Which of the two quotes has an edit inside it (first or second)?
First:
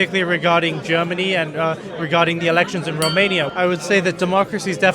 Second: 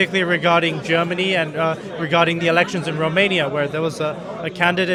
first